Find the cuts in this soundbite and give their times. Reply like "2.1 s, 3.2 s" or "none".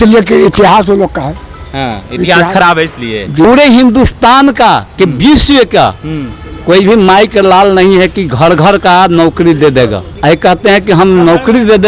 3.4 s, 10.1 s